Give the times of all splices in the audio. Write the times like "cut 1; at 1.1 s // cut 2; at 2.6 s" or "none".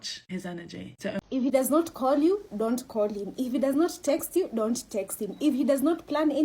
cut 1; at 1.2 s